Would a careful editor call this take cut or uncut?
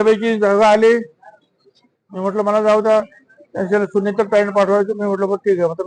uncut